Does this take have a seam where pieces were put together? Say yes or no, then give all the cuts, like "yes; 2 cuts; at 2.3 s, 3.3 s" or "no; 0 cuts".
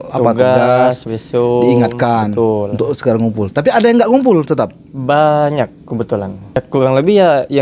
yes; 1 cut; at 6.6 s